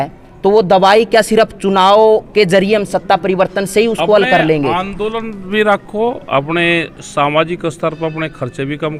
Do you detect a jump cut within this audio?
no; 0 cuts

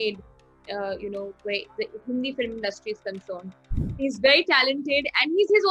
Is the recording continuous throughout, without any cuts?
no; 1 cut; at 4.0 s

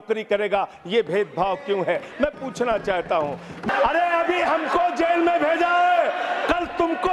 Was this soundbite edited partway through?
yes; 1 cut; at 3.6 s

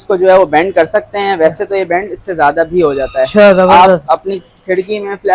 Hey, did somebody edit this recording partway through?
no; 0 cuts

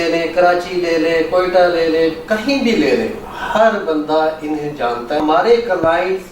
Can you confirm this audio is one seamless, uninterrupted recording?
no; 1 cut; at 5.2 s

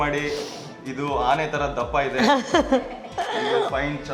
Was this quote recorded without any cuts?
yes; 0 cuts

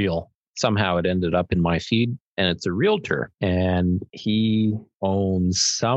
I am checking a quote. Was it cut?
yes; 4 cuts; at 2.3 s, 3.3 s, 4.1 s, 4.9 s

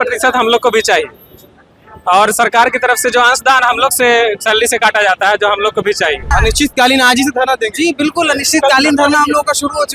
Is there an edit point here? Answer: yes; 1 cut; at 6.3 s

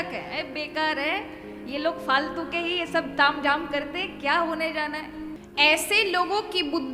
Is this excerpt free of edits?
no; 1 cut; at 5.4 s

